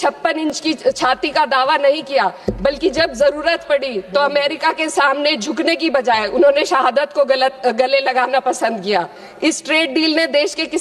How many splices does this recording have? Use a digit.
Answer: 1